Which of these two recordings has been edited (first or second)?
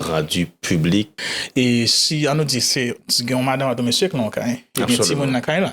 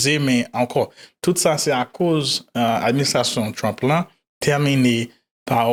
first